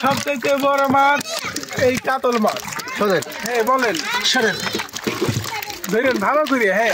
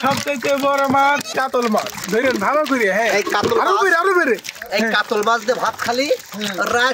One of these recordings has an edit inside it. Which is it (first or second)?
second